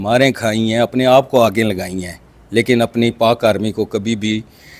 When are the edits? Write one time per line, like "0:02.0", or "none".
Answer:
none